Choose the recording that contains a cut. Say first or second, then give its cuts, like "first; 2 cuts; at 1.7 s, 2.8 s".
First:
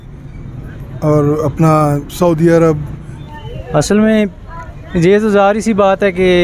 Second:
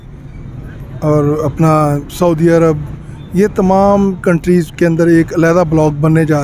first; 1 cut; at 3.3 s